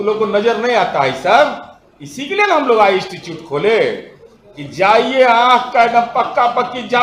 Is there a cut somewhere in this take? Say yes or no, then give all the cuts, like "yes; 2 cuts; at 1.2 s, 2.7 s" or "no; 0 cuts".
no; 0 cuts